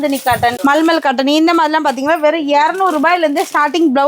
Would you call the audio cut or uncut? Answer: uncut